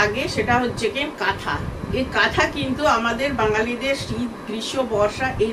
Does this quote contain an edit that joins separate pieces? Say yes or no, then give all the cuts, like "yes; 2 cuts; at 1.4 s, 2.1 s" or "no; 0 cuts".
no; 0 cuts